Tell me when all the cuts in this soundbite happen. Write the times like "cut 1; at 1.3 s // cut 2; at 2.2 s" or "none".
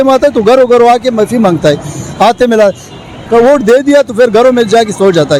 none